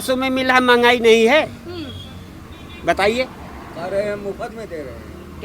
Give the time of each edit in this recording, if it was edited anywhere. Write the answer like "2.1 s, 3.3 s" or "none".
none